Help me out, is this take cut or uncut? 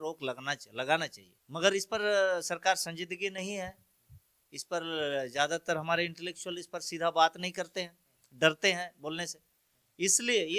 uncut